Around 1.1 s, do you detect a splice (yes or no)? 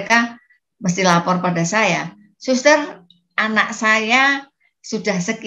no